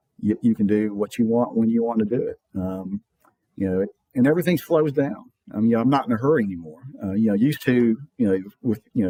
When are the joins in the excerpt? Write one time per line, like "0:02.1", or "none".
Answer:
none